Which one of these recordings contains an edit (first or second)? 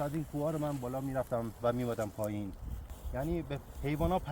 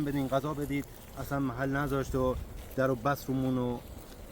first